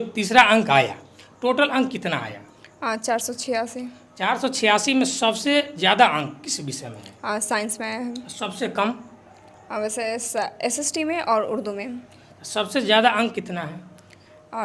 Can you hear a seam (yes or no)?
no